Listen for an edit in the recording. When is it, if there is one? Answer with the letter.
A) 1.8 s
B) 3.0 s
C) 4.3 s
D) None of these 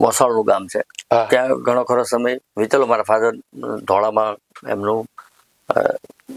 D